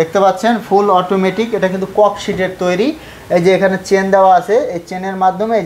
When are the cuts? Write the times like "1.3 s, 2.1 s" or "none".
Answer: none